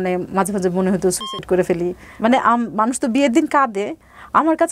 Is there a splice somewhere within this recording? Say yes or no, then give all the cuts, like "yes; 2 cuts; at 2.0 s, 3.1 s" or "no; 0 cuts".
yes; 1 cut; at 2.0 s